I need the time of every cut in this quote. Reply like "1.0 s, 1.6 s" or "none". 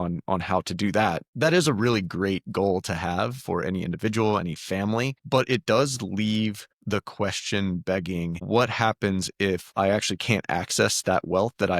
1.3 s, 5.2 s, 6.7 s, 8.4 s